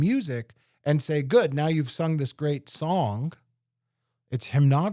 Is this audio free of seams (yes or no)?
yes